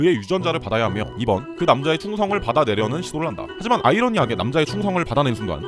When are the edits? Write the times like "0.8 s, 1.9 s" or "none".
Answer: 1.1 s